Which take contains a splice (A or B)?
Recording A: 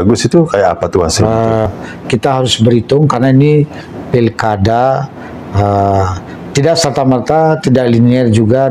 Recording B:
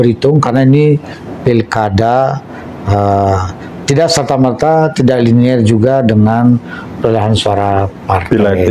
A